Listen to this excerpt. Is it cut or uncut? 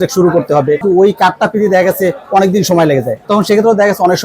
cut